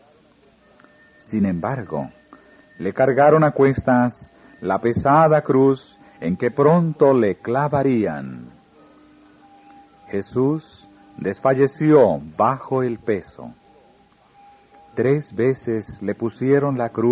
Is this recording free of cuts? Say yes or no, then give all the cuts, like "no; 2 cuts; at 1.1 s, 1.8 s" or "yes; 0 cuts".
no; 1 cut; at 6.5 s